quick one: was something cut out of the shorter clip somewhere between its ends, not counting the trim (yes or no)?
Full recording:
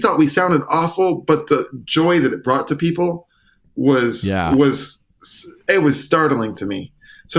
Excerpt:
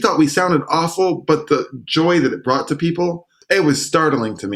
yes